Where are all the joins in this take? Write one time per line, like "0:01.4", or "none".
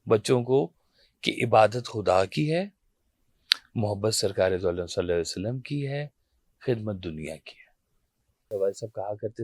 0:08.5